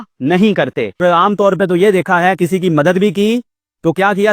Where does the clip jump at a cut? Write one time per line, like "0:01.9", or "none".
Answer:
0:01.0